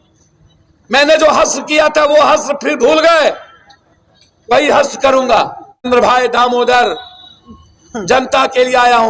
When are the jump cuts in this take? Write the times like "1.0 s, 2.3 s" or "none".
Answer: 5.8 s

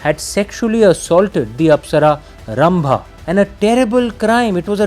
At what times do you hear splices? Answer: 3.1 s

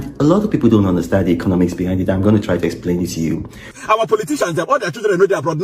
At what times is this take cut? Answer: 3.8 s

